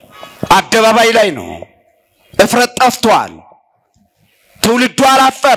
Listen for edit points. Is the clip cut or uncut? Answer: uncut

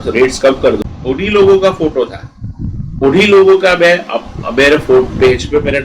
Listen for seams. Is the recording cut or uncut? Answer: cut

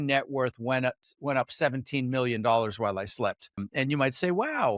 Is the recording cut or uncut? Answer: cut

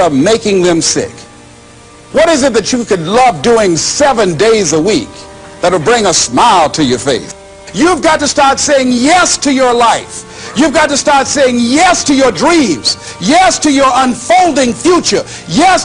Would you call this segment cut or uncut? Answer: cut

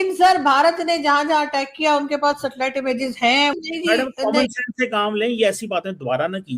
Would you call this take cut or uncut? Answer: cut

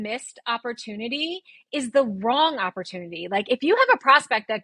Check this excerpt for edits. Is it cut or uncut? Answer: uncut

